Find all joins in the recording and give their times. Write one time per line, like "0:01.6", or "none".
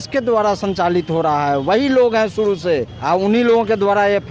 0:02.9